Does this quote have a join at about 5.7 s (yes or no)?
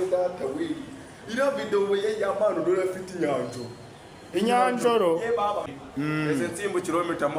yes